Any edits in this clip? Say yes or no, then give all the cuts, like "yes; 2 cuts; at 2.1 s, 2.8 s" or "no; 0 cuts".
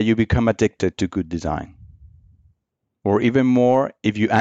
yes; 1 cut; at 2.9 s